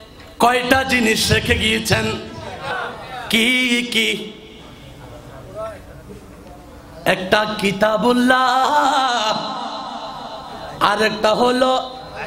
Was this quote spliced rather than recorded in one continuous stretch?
yes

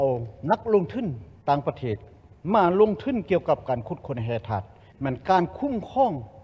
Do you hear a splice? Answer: yes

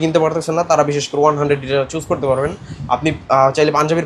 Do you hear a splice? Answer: no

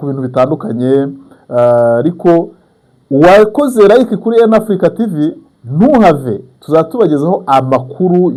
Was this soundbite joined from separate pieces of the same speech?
no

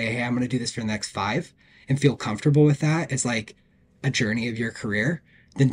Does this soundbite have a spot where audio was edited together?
no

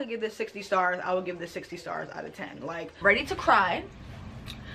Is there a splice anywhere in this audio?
yes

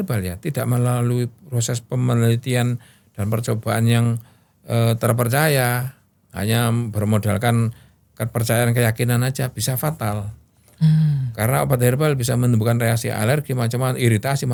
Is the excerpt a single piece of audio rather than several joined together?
yes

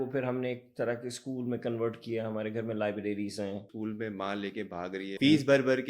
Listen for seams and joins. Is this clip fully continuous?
no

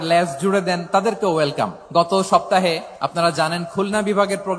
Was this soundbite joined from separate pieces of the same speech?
yes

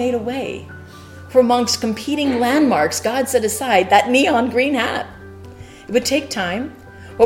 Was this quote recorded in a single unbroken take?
yes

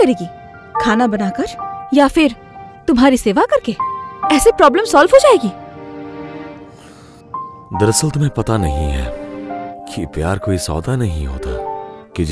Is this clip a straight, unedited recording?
yes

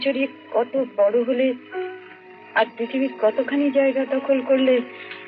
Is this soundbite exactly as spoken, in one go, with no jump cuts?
yes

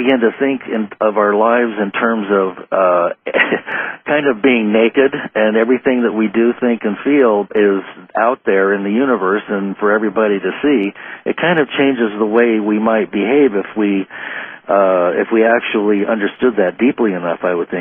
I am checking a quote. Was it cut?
no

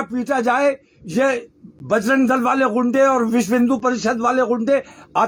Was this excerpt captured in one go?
yes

